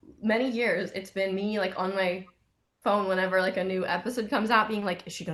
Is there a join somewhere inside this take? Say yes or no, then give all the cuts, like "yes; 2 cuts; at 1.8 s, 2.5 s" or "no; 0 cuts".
no; 0 cuts